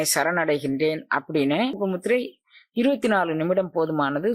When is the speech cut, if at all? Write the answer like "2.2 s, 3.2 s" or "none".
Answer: 1.8 s